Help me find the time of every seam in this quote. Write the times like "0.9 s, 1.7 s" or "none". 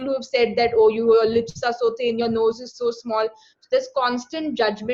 none